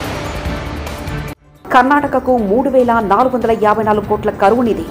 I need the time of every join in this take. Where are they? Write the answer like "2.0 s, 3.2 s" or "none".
1.4 s